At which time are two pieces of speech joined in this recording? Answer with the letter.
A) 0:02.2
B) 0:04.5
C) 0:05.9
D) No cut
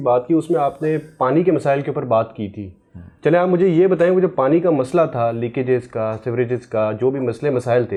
D